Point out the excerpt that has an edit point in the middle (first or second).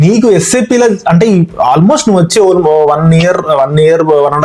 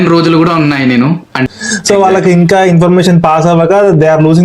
second